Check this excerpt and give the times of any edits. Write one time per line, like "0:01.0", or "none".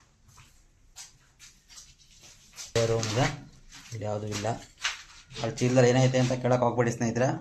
0:02.8